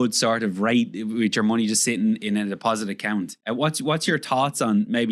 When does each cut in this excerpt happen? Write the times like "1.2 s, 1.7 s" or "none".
3.4 s